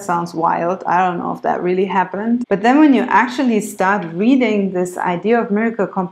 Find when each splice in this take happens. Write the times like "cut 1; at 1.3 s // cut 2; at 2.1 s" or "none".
cut 1; at 2.4 s

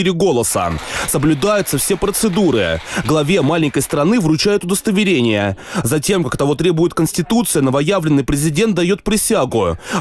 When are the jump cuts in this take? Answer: none

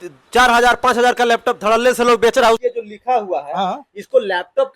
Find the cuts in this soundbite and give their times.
cut 1; at 2.6 s

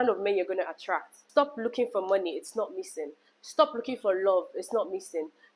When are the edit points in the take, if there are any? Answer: cut 1; at 1.2 s

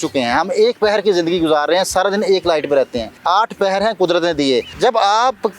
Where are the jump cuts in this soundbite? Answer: cut 1; at 3.1 s // cut 2; at 4.7 s

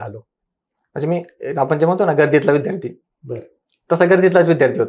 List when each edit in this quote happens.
none

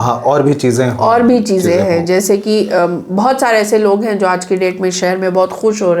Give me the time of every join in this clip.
none

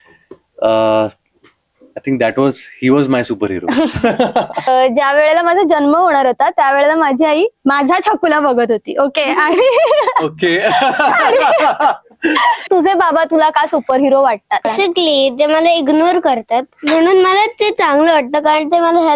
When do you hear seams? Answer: cut 1; at 4.7 s // cut 2; at 12.7 s // cut 3; at 14.7 s

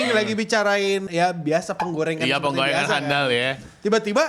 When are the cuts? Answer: cut 1; at 1.1 s

